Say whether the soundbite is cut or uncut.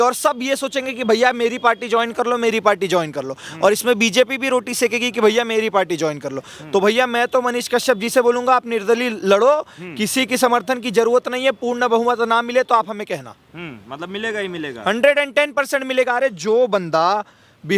uncut